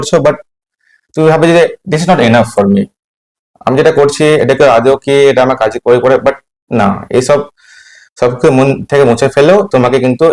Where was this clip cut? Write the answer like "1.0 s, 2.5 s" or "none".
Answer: none

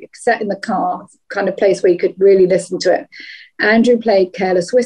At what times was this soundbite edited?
none

